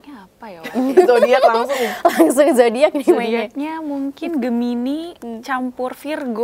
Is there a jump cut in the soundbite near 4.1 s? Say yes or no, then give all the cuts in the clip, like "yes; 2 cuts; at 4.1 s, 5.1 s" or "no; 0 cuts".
no; 0 cuts